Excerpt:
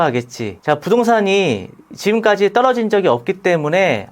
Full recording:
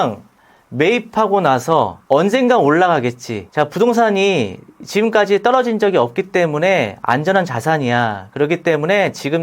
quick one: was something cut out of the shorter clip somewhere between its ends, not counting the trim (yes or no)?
no